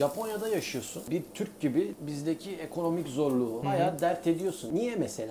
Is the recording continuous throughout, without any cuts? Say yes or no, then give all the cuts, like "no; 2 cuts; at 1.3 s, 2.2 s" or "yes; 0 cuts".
no; 1 cut; at 1.1 s